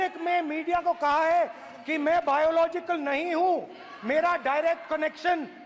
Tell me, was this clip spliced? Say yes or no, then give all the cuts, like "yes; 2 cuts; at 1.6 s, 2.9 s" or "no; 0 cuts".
no; 0 cuts